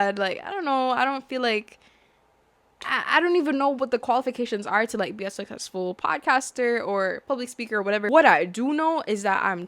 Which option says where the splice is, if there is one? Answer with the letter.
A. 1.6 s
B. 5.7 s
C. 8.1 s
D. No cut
C